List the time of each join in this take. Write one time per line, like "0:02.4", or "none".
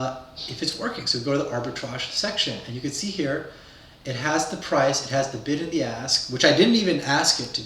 none